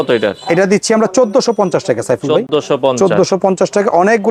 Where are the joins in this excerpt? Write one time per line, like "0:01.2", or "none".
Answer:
none